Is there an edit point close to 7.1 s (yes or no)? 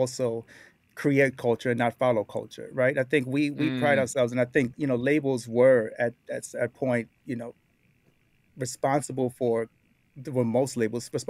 no